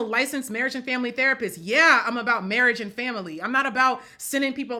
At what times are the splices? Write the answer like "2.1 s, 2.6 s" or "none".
none

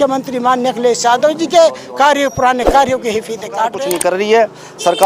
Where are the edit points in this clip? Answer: 3.8 s

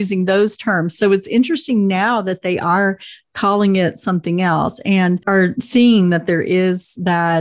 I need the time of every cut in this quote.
5.2 s

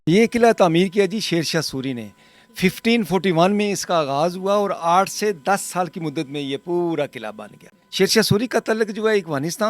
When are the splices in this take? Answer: 7.8 s

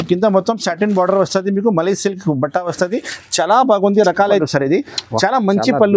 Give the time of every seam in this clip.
4.4 s

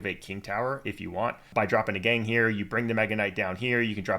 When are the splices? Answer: 1.5 s

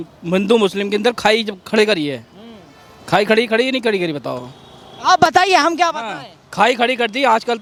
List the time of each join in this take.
none

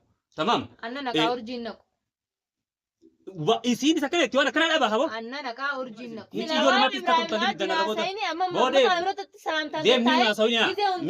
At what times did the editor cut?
6.1 s

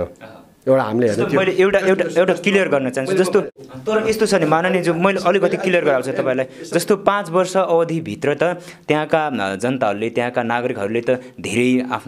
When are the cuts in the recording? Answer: 3.6 s

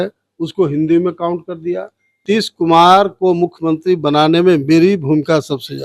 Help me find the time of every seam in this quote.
2.2 s

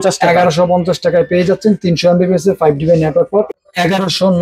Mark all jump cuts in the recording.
3.5 s

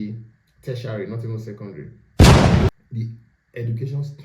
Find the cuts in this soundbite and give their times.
1.9 s, 2.7 s

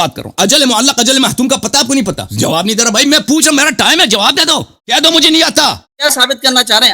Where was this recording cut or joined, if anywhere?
2.2 s

